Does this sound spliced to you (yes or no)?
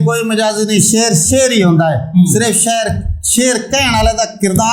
no